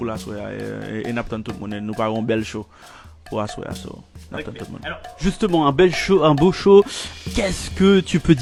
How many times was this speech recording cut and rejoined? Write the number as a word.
zero